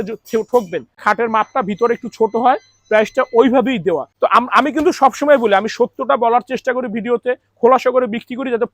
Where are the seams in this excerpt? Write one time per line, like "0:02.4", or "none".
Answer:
0:01.0
0:04.1